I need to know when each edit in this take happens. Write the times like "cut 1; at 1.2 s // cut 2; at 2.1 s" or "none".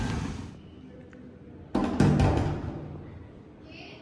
none